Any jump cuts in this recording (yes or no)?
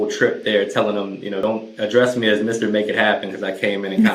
yes